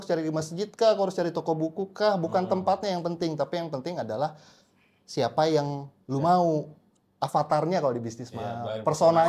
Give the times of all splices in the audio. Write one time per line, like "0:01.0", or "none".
none